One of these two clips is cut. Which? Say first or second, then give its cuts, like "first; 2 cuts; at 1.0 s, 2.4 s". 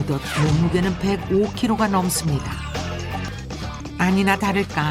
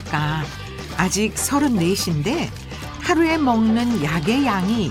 first; 1 cut; at 3.3 s